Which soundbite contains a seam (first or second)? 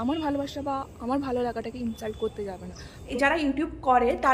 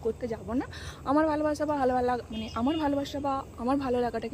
first